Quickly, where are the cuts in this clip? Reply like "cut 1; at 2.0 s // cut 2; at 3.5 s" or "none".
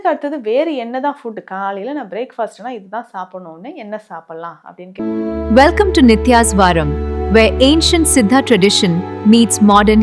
cut 1; at 4.9 s